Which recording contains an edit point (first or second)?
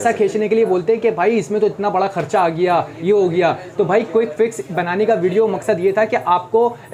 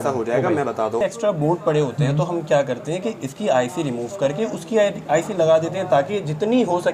second